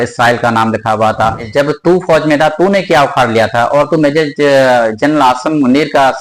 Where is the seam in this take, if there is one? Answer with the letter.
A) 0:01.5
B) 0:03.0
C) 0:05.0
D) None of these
A